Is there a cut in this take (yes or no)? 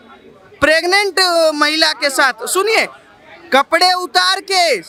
no